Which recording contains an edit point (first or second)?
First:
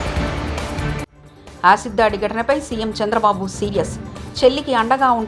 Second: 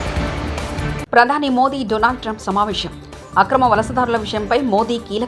second